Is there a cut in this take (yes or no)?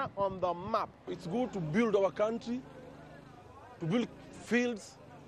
yes